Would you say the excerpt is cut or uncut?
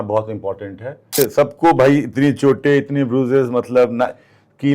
cut